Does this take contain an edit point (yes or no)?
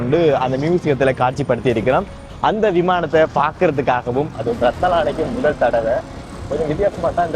yes